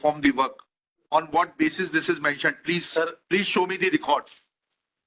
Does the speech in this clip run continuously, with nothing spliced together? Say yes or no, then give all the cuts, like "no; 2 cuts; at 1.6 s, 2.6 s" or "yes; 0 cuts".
no; 1 cut; at 1.0 s